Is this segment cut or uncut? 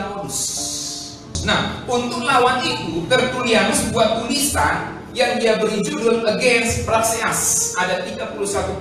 uncut